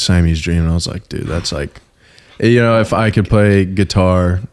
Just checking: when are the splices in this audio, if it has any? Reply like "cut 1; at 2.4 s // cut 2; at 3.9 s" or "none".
none